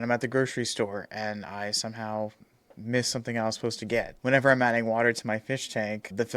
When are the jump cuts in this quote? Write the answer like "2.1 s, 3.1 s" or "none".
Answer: none